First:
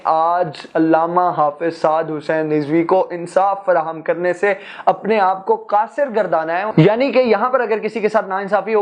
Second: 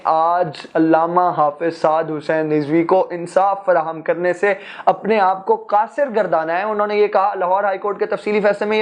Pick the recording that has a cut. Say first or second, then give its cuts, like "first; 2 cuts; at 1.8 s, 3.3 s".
first; 1 cut; at 6.7 s